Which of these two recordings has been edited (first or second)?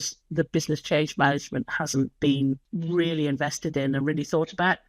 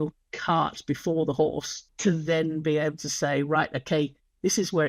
first